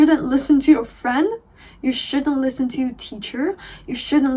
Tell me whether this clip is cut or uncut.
uncut